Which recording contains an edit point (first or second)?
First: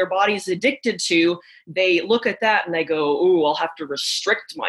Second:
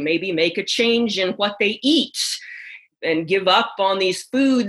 second